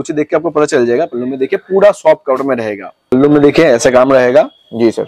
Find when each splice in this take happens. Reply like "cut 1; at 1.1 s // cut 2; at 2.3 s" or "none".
cut 1; at 3.1 s